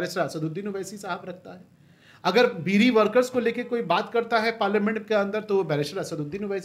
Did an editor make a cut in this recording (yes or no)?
no